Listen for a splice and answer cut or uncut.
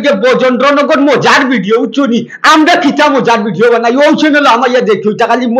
uncut